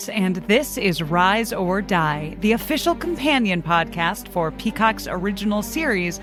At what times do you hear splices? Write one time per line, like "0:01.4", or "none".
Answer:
none